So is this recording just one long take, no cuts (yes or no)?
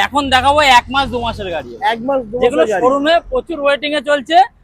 yes